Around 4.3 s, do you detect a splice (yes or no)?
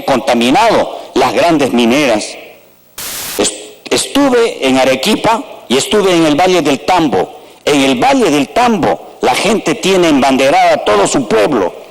no